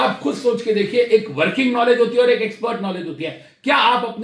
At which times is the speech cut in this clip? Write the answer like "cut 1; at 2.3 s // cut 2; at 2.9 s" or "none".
none

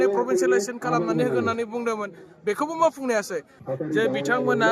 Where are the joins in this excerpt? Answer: cut 1; at 3.6 s

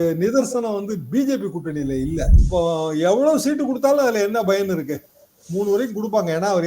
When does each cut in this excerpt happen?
cut 1; at 2.4 s

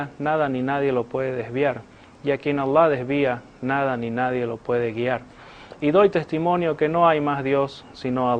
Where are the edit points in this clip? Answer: none

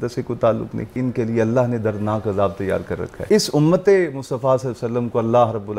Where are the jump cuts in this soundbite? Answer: cut 1; at 0.9 s // cut 2; at 3.2 s

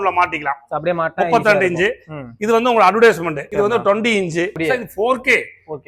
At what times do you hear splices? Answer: cut 1; at 4.5 s

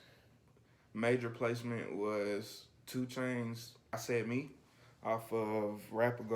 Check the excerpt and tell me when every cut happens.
cut 1; at 3.9 s

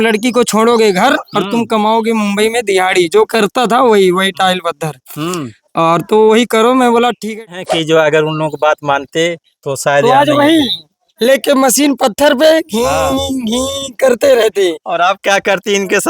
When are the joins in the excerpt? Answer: cut 1; at 7.4 s

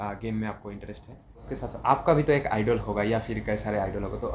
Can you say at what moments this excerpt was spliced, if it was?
cut 1; at 1.5 s

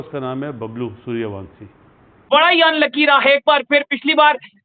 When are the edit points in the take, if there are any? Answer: cut 1; at 2.3 s

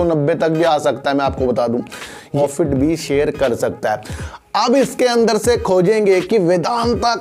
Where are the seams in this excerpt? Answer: cut 1; at 2.4 s

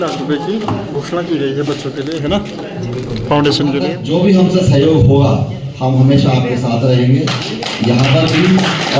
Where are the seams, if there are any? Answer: cut 1; at 4.0 s

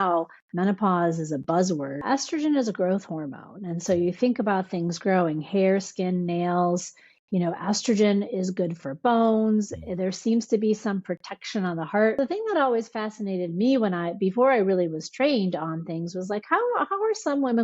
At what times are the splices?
cut 1; at 2.0 s // cut 2; at 12.2 s

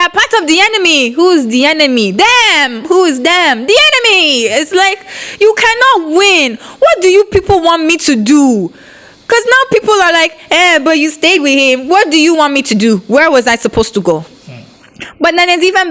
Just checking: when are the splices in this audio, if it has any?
none

